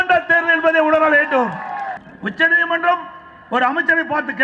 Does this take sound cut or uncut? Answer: cut